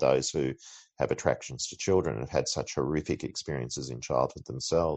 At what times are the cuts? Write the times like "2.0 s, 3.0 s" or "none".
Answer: none